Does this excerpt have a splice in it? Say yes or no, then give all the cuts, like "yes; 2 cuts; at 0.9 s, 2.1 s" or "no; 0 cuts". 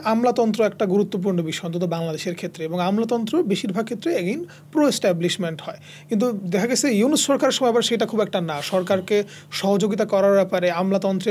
no; 0 cuts